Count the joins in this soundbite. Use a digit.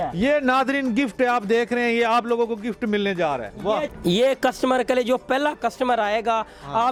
0